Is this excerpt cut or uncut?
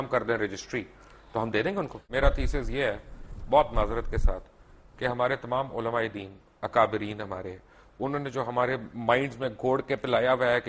cut